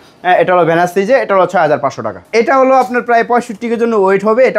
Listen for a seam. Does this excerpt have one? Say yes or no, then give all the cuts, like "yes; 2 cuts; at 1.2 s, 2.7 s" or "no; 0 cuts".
yes; 1 cut; at 2.3 s